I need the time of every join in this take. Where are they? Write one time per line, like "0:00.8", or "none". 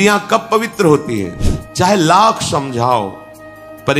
0:01.3

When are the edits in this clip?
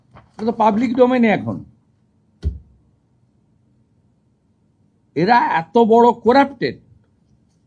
none

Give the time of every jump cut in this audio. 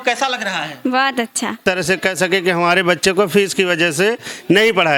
0:01.6

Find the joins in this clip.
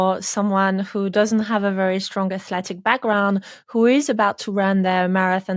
none

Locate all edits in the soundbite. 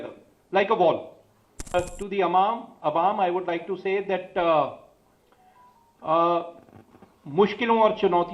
0:01.7

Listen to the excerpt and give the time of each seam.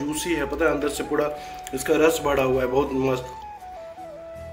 0:03.3

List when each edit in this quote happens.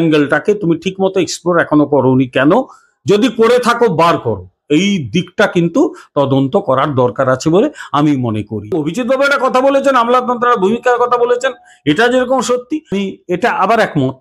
0:08.7
0:12.9

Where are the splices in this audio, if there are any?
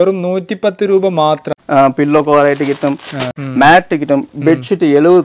0:01.5
0:03.3

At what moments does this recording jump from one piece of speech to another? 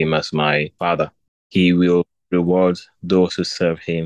0:01.3

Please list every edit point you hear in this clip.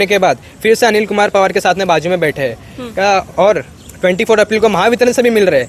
none

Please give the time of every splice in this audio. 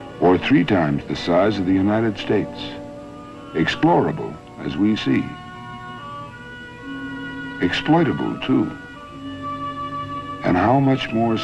0:08.9

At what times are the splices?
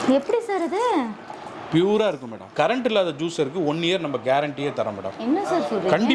0:02.5

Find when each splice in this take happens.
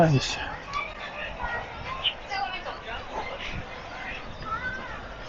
none

